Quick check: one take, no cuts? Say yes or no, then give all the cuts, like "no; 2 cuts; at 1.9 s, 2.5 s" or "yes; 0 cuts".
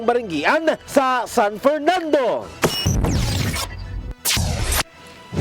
no; 2 cuts; at 2.5 s, 3.3 s